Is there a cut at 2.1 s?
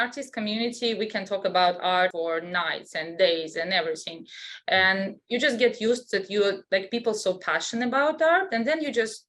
yes; 1 cut; at 2.1 s

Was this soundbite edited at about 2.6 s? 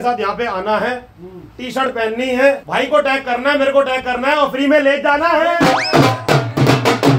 yes; 1 cut; at 2.6 s

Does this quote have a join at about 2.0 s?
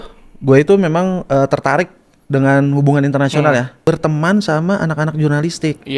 no; 1 cut; at 3.7 s

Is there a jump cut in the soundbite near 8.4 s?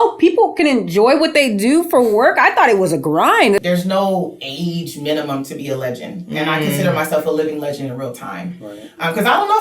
no; 1 cut; at 3.6 s

